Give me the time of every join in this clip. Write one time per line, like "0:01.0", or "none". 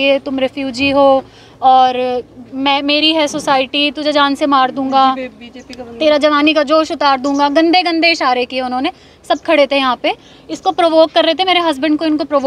none

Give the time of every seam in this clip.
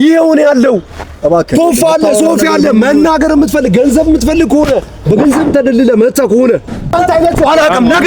0:06.9

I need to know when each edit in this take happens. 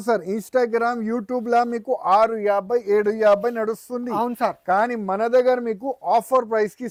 none

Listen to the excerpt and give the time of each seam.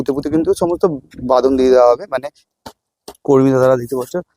0:02.6

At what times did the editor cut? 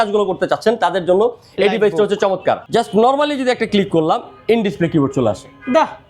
0:02.6

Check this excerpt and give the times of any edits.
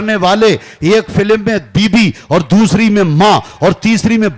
none

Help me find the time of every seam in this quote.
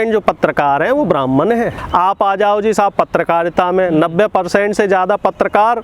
0:01.8

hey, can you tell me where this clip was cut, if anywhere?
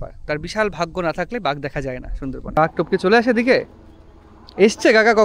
0:02.6

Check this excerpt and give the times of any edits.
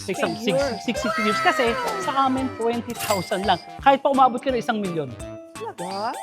0:01.9

